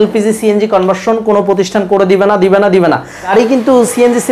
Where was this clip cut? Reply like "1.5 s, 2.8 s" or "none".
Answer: 3.3 s